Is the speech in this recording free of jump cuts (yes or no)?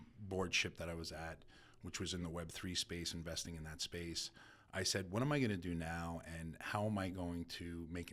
yes